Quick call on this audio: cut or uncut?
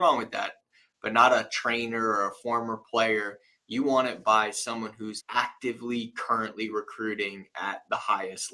cut